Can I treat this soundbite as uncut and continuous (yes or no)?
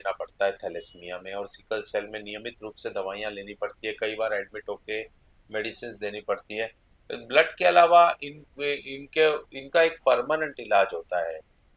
yes